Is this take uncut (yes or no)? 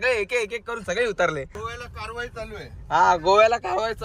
no